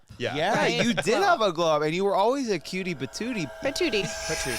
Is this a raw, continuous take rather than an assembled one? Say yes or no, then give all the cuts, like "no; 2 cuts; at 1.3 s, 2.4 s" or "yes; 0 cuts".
no; 1 cut; at 3.5 s